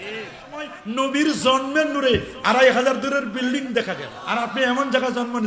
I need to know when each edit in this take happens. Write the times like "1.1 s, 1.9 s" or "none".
0.9 s, 4.1 s